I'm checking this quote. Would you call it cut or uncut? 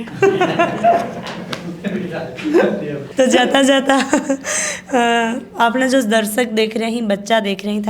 uncut